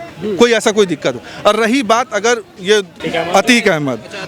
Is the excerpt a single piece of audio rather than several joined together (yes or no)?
no